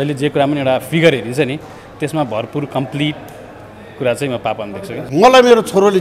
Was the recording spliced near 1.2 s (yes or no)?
no